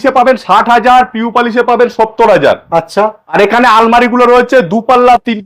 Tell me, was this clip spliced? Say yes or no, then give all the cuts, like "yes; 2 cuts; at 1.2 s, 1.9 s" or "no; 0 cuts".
yes; 1 cut; at 3.3 s